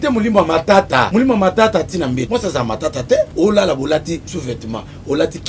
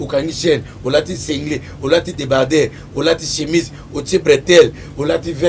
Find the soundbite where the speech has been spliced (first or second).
first